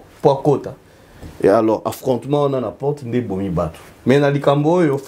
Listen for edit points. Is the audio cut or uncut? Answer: cut